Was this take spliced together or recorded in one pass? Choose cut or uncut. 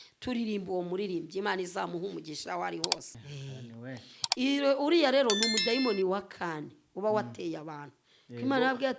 cut